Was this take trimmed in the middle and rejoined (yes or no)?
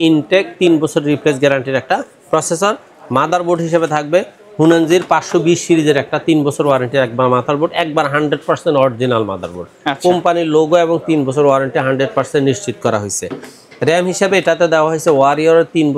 no